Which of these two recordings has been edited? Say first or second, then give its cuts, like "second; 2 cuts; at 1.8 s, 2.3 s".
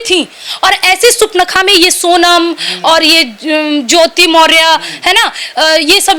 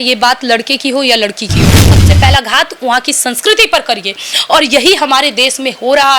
second; 1 cut; at 1.9 s